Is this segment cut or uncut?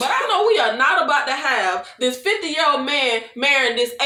uncut